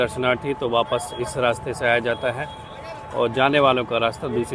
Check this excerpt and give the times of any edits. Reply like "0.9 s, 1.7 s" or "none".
none